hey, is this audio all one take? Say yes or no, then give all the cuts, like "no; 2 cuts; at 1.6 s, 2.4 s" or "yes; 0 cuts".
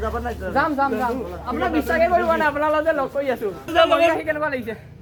yes; 0 cuts